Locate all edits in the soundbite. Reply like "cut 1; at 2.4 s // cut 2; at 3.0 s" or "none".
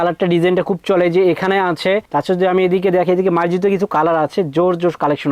none